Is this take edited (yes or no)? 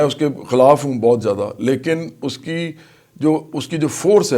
no